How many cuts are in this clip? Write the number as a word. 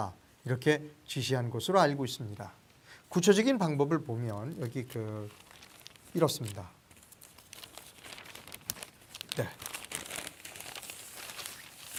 zero